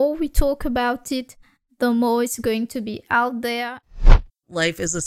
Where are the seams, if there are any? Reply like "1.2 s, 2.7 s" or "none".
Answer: 3.9 s